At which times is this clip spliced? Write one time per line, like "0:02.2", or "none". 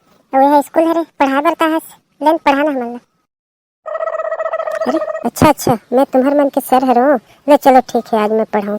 none